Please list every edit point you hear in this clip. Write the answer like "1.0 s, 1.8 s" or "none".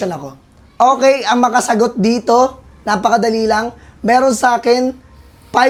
none